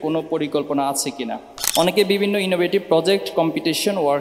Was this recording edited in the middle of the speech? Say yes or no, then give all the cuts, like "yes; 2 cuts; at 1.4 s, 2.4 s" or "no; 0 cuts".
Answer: yes; 1 cut; at 1.5 s